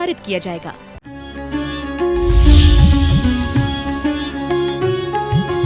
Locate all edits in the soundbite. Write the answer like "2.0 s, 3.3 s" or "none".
1.1 s